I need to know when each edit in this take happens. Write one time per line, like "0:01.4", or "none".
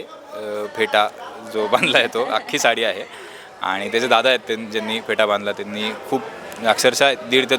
none